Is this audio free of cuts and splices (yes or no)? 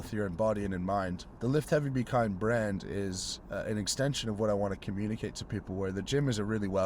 no